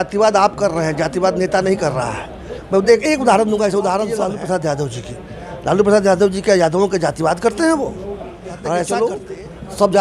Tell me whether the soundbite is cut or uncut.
cut